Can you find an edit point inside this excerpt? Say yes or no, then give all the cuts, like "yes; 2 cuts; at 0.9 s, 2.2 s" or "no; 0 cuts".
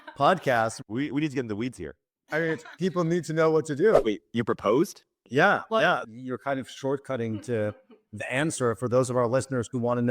yes; 2 cuts; at 4.0 s, 6.0 s